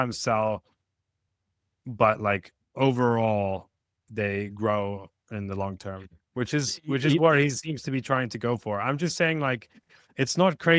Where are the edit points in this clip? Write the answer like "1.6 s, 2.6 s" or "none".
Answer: 4.0 s